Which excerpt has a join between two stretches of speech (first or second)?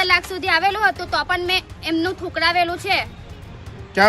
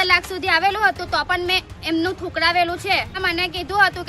second